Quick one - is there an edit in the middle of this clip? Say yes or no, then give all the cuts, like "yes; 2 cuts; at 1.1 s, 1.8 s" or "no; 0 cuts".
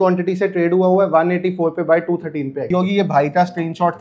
yes; 1 cut; at 2.7 s